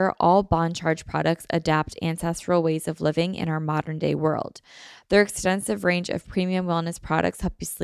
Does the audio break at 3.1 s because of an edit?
no; 0 cuts

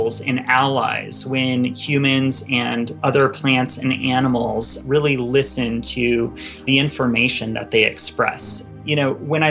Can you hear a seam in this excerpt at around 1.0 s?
no; 4 cuts; at 2.9 s, 4.8 s, 6.7 s, 8.5 s

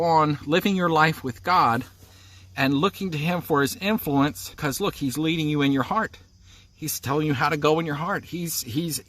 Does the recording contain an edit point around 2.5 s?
no; 1 cut; at 4.6 s

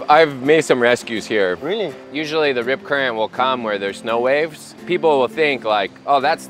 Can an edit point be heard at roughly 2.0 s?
yes; 1 cut; at 2.0 s

